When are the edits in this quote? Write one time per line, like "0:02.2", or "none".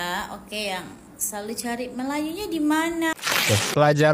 0:03.1

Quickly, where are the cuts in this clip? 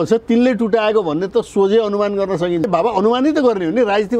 0:02.6

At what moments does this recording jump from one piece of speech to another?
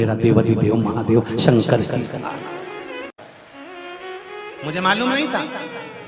0:03.1

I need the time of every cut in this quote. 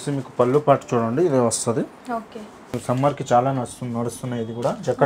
0:02.7

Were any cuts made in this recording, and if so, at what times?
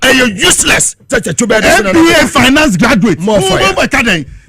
0:01.1

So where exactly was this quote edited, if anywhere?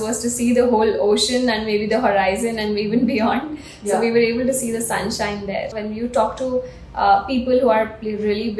0:05.8

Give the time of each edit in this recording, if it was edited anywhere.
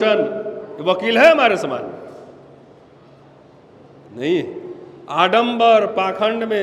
none

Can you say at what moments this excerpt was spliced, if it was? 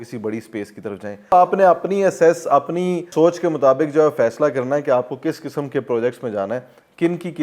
0:01.3
0:03.1

